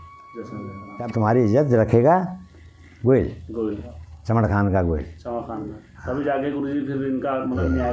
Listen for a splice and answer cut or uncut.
cut